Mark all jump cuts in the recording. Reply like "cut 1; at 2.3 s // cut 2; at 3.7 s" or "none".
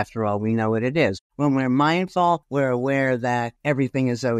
cut 1; at 1.2 s // cut 2; at 2.5 s // cut 3; at 3.5 s